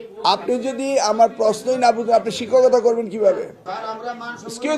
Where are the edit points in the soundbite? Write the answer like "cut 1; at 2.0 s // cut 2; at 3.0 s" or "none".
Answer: cut 1; at 3.7 s